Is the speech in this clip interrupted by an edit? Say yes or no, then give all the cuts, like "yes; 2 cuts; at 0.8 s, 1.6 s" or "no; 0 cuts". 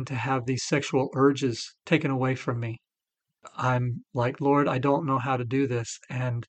yes; 2 cuts; at 1.7 s, 3.4 s